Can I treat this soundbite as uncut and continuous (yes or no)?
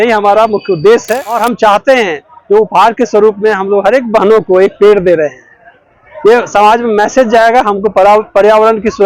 no